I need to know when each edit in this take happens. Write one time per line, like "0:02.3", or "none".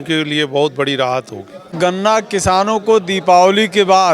0:01.8